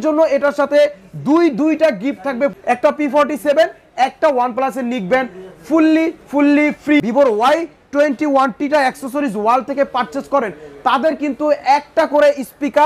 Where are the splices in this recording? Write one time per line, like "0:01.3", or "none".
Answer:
0:02.6
0:07.0